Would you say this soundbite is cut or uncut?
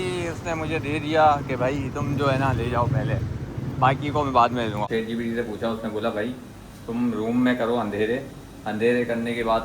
cut